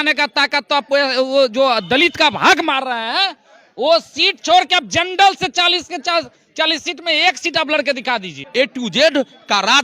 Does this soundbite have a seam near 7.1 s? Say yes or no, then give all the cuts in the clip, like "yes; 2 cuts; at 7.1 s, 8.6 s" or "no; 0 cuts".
no; 1 cut; at 8.4 s